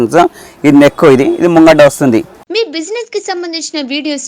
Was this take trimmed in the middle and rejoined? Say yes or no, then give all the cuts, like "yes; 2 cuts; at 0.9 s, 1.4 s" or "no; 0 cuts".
yes; 1 cut; at 2.4 s